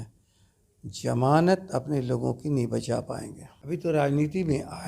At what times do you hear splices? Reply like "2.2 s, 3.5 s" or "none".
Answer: 3.4 s